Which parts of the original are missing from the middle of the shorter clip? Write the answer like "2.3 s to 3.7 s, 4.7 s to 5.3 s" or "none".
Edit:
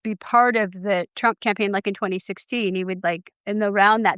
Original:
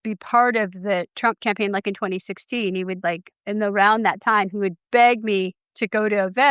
none